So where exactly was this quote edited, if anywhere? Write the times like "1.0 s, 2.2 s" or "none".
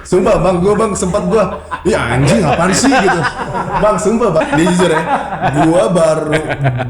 4.4 s